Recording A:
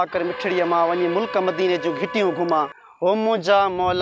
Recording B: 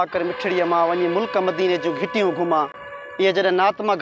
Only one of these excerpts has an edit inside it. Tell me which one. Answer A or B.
A